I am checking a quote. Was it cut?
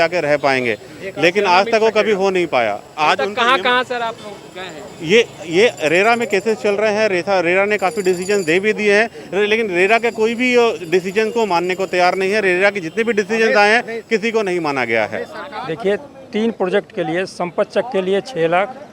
no; 0 cuts

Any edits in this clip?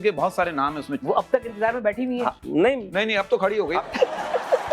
yes; 2 cuts; at 0.9 s, 3.8 s

